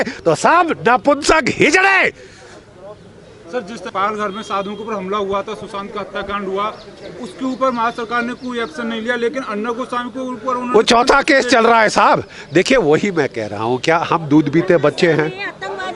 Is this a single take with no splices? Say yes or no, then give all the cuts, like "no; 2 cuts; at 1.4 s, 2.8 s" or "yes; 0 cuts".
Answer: yes; 0 cuts